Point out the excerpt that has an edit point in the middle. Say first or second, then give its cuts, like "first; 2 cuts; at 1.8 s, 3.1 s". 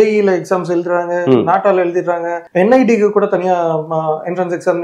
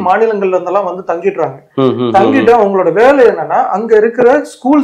first; 1 cut; at 2.4 s